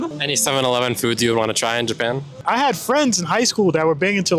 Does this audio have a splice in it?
yes; 1 cut; at 2.3 s

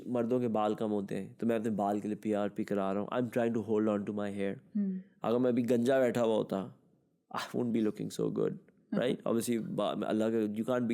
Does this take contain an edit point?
no; 0 cuts

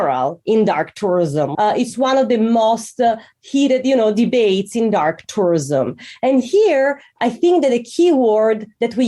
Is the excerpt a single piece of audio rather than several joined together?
no; 1 cut; at 1.5 s

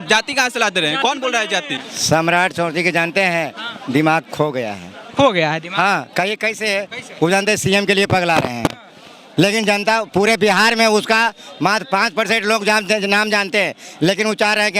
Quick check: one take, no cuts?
no; 1 cut; at 1.8 s

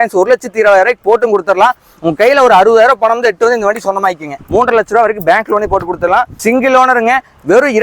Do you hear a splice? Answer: yes; 2 cuts; at 4.3 s, 6.3 s

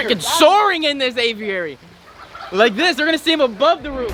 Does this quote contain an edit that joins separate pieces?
no; 0 cuts

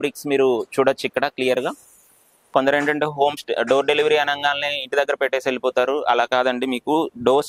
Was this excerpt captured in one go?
no; 1 cut; at 2.4 s

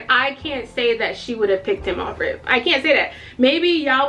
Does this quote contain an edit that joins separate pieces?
no; 0 cuts

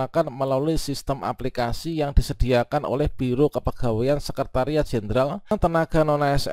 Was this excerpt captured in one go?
no; 1 cut; at 5.5 s

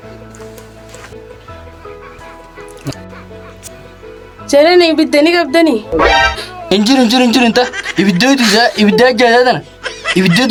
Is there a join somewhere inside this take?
no; 0 cuts

